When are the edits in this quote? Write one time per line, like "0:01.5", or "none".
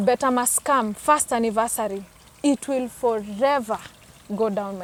none